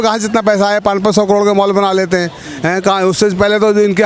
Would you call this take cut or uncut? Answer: uncut